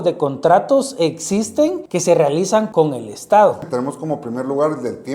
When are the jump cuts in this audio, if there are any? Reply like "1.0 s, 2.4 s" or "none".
1.9 s, 2.7 s, 3.7 s